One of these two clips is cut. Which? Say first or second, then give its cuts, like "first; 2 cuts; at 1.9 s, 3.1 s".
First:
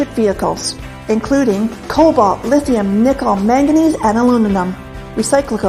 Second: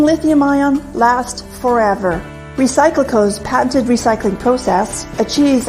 second; 1 cut; at 1.2 s